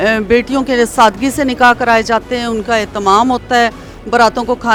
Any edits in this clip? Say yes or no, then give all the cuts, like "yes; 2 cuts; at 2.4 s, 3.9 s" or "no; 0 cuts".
no; 0 cuts